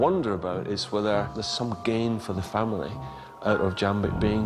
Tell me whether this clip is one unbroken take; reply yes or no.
no